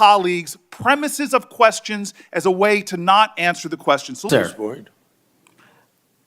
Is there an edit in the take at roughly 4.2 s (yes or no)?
yes